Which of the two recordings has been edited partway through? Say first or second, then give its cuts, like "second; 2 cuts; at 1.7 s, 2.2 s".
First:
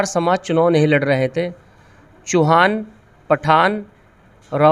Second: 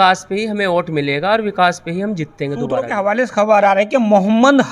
second; 1 cut; at 2.7 s